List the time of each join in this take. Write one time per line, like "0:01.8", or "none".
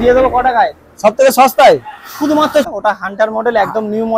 0:02.7